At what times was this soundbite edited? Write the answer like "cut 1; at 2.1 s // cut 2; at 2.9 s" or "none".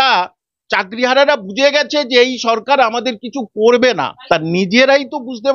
cut 1; at 4.2 s